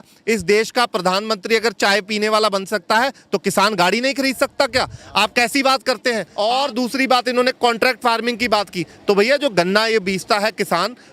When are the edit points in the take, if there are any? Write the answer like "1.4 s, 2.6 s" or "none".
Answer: 6.3 s